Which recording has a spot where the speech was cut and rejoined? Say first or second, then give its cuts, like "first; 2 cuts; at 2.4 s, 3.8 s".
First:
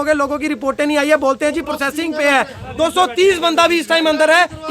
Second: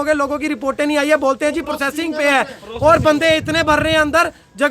first; 1 cut; at 2.6 s